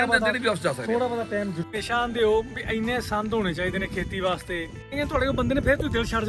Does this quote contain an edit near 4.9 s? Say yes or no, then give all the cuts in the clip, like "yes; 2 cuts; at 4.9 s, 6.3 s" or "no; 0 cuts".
yes; 2 cuts; at 1.7 s, 4.9 s